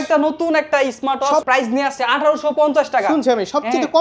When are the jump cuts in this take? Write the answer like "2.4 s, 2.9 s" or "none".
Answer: 1.4 s